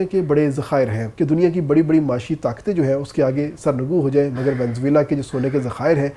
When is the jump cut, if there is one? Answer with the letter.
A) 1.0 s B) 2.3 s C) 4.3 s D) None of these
A